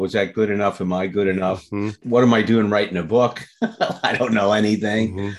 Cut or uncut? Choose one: cut